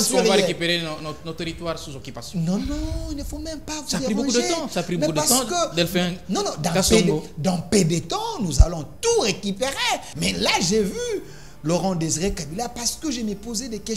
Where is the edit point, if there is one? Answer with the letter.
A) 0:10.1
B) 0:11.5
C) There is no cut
A